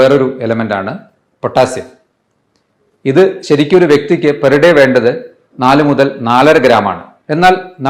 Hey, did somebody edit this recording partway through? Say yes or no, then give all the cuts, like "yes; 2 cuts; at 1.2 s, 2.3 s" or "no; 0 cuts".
no; 0 cuts